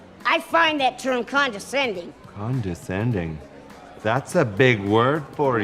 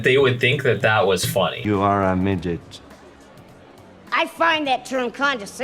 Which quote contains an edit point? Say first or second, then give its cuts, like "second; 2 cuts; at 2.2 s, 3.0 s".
second; 1 cut; at 1.6 s